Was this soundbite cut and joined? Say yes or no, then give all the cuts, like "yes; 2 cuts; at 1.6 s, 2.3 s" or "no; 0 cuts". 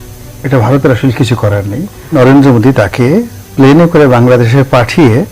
yes; 1 cut; at 2.1 s